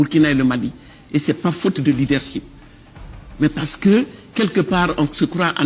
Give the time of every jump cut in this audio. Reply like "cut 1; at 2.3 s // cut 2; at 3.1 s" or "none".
none